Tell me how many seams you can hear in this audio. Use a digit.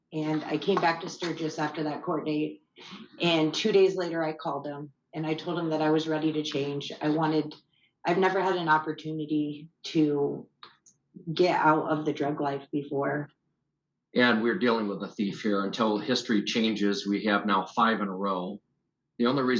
1